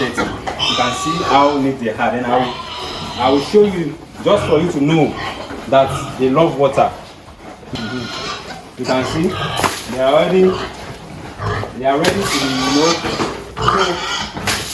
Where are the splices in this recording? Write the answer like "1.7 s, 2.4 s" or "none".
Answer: none